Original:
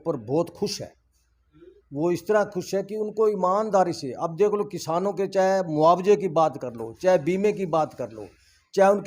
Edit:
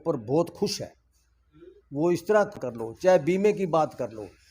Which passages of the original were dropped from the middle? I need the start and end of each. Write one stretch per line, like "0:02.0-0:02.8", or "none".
0:02.6-0:06.6

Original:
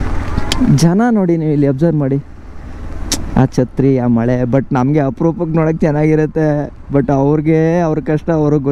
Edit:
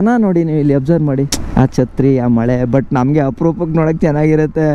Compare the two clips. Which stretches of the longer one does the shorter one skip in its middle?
0:02.3-0:03.2

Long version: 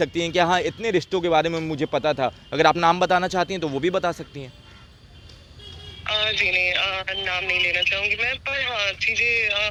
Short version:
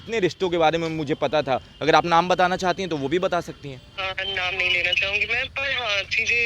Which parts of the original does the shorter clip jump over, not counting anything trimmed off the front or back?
0:04.7-0:06.9

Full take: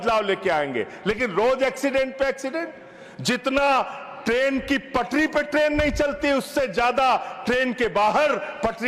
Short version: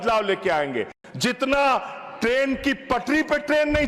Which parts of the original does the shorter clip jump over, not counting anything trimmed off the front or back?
0:00.9-0:03.0

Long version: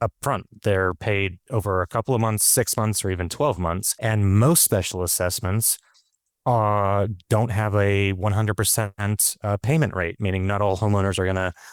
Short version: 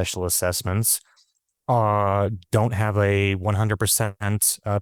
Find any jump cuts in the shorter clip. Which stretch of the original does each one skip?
none

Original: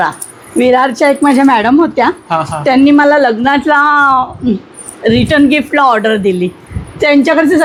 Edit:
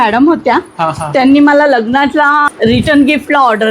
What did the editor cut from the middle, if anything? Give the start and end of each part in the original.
0:04.0-0:04.9

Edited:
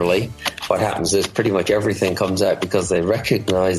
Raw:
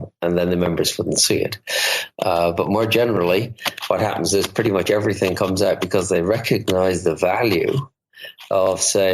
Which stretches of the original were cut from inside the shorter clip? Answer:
none

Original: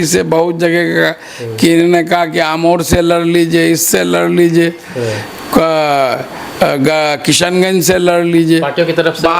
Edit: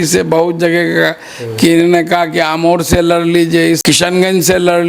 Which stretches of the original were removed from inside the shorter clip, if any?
0:03.8-0:07.2

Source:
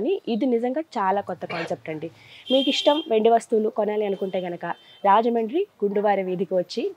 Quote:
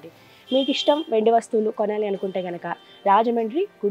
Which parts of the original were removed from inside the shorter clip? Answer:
none

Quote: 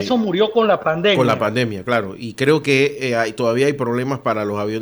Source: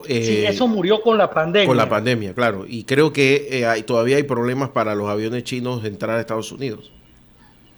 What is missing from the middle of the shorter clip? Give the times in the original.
none

